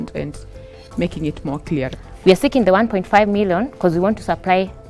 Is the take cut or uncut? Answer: cut